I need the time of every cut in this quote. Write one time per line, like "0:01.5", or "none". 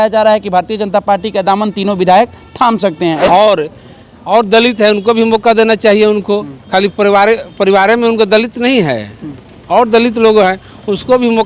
0:03.3